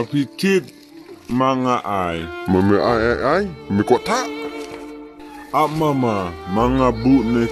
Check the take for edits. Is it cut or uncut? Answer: uncut